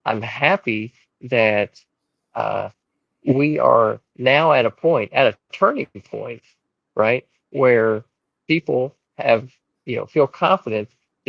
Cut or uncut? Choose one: uncut